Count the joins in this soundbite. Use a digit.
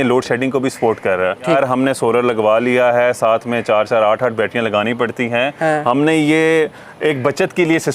1